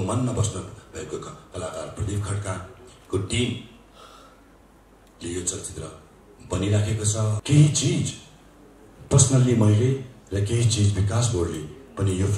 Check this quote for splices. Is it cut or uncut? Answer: cut